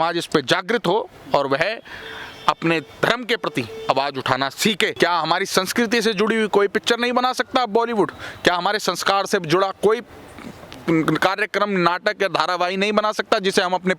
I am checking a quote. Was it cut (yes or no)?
yes